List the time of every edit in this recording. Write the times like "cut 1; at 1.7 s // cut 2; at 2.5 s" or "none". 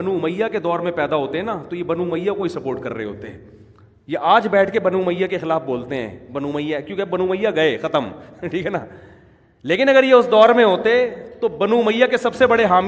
none

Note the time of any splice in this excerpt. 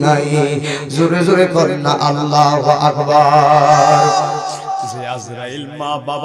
cut 1; at 4.8 s

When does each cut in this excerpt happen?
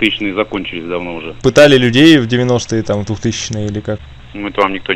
cut 1; at 1.4 s

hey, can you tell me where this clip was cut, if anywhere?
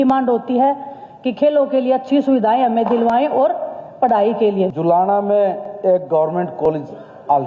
cut 1; at 4.7 s

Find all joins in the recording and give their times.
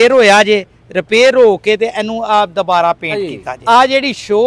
cut 1; at 3.1 s

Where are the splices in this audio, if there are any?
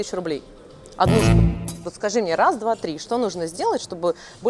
cut 1; at 1.5 s

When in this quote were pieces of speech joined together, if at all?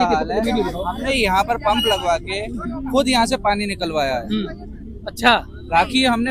none

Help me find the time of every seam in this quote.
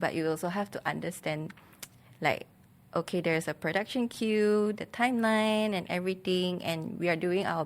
none

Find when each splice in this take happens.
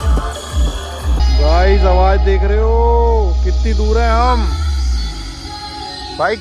cut 1; at 1.2 s

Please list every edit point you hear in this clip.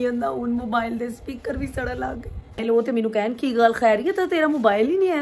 cut 1; at 2.6 s

